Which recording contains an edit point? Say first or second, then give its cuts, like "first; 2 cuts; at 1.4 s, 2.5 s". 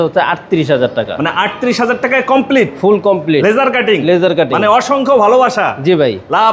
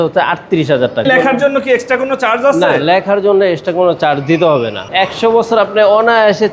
second; 2 cuts; at 1.1 s, 4.8 s